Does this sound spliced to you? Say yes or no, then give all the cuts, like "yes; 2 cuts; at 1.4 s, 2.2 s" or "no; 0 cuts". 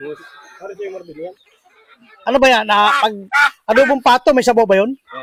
no; 0 cuts